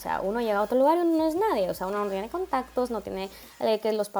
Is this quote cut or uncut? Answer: uncut